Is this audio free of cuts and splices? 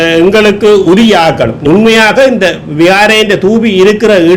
no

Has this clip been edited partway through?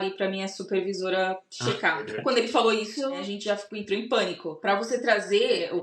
yes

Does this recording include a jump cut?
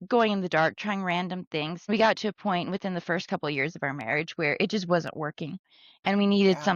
yes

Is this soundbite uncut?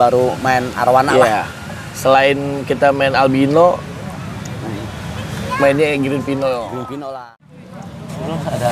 no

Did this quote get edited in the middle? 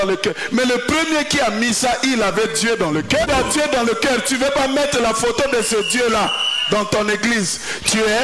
yes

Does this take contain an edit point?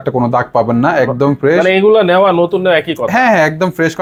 no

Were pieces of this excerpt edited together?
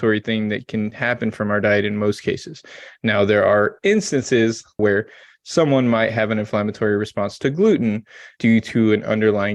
yes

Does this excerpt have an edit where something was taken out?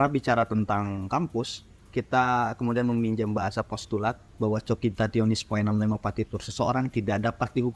no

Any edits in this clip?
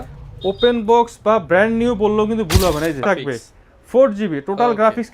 yes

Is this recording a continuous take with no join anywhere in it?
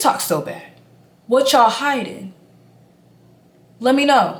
yes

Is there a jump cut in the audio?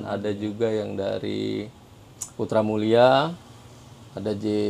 no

